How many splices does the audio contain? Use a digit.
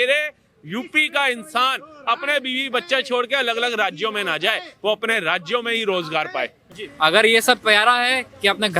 1